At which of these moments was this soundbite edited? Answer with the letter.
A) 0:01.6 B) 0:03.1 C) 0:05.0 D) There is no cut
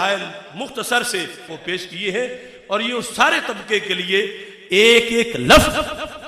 A